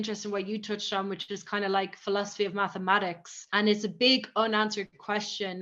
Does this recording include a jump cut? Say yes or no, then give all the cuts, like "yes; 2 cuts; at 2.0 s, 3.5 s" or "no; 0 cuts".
no; 0 cuts